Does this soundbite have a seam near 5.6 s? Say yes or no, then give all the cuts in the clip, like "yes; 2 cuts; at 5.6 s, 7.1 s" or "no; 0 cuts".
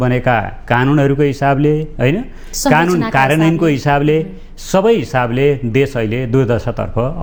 no; 0 cuts